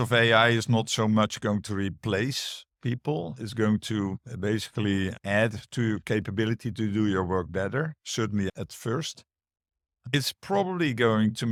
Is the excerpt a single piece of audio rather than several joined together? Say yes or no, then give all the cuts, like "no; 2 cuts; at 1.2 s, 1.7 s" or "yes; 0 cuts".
yes; 0 cuts